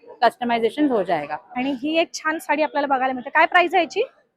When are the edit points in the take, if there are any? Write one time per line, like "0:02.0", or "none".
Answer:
0:01.4